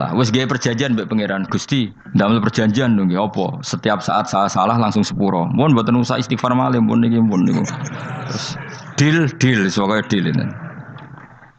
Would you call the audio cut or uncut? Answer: cut